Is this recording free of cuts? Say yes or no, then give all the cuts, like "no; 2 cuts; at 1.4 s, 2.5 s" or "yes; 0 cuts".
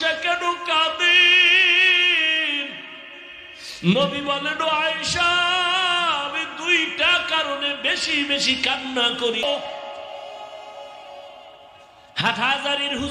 no; 1 cut; at 9.4 s